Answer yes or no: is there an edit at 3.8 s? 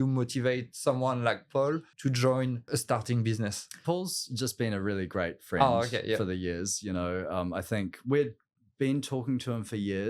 yes